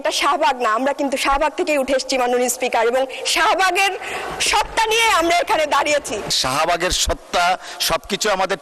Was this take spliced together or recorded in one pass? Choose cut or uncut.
cut